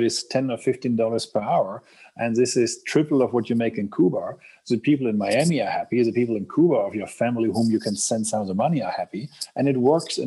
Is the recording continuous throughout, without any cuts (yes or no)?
yes